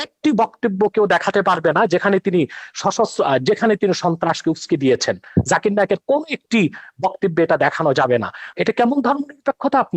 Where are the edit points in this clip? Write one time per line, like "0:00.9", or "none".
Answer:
0:08.5